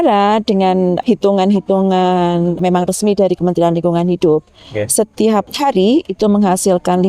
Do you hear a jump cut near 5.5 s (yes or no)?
yes